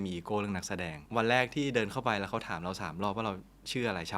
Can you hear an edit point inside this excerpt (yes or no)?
yes